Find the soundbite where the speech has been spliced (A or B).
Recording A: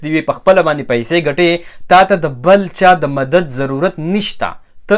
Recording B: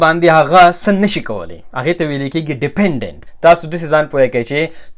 B